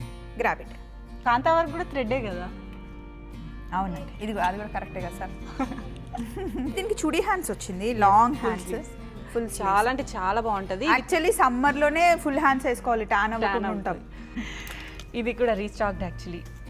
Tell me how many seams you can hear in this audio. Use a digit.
3